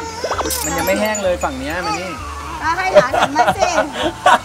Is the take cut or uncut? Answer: uncut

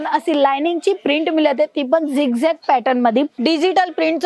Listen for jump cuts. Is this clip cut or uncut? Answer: cut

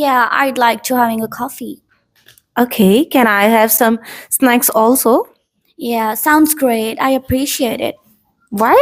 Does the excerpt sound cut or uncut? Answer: uncut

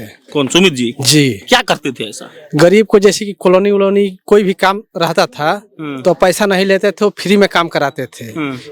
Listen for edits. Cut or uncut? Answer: uncut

